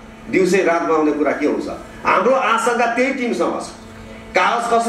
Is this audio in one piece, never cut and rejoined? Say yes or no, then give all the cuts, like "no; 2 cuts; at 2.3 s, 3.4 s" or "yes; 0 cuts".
yes; 0 cuts